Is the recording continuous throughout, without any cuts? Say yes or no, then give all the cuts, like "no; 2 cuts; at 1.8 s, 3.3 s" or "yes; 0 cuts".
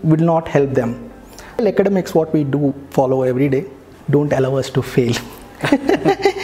no; 1 cut; at 1.6 s